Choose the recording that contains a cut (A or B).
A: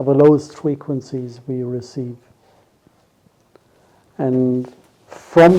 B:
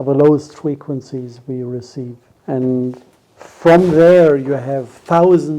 B